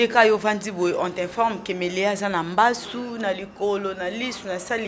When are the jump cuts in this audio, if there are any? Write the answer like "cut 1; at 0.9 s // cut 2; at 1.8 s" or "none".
none